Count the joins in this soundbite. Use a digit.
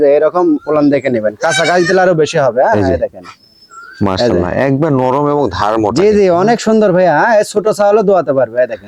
0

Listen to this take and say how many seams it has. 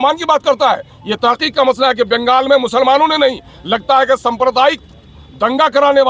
0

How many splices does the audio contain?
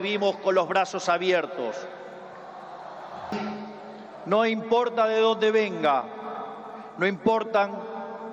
1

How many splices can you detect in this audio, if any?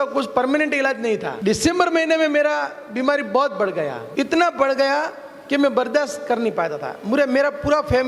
2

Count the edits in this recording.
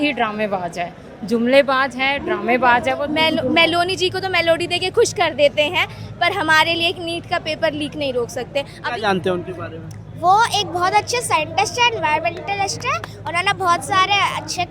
2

